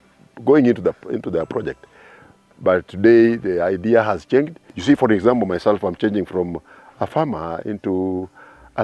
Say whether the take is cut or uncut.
cut